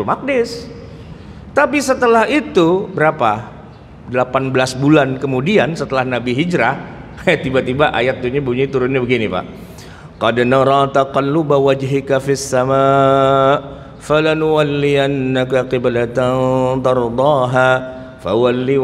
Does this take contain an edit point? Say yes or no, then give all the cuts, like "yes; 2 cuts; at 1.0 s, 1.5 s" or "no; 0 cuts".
no; 0 cuts